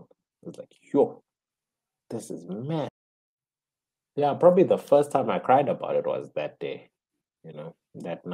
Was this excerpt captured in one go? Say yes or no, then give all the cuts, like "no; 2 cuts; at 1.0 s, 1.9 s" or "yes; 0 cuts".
no; 1 cut; at 2.9 s